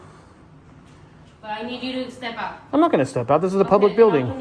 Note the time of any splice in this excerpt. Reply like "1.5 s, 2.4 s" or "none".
1.3 s